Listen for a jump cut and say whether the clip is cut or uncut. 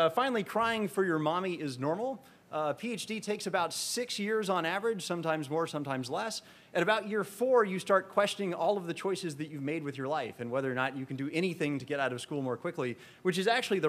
uncut